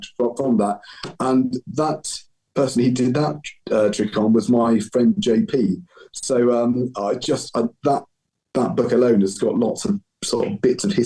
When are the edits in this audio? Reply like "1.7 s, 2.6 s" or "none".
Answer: none